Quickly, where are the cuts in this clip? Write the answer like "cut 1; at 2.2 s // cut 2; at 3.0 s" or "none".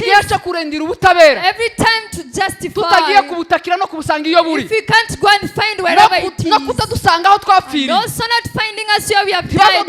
none